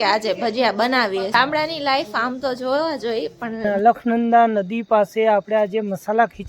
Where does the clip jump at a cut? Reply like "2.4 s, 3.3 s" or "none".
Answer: 1.3 s, 3.7 s